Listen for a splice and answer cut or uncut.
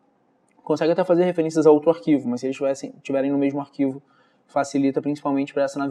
uncut